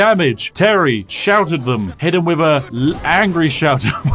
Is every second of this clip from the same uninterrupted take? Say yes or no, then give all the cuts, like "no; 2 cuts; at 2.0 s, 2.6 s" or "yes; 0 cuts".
yes; 0 cuts